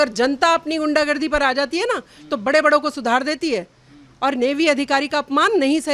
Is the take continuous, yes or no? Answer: yes